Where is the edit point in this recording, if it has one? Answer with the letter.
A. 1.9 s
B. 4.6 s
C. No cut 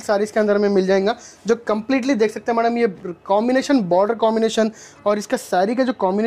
C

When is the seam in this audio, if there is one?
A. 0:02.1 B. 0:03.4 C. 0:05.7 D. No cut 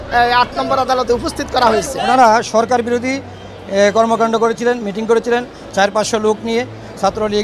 A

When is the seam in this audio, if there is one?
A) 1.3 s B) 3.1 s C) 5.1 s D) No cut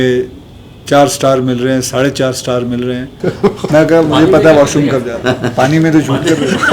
B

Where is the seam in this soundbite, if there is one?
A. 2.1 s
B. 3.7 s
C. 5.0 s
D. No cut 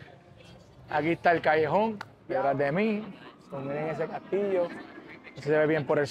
A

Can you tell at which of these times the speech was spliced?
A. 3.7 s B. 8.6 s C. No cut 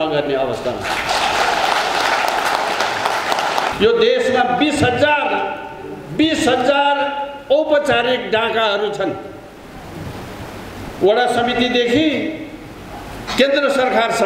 A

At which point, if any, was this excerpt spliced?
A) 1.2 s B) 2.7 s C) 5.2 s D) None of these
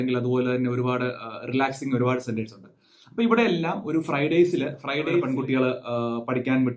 C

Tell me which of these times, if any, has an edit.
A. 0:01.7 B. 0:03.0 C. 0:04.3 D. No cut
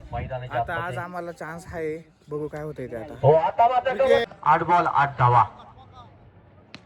C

